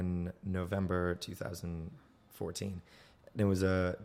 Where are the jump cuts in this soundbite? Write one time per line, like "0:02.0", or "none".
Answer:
none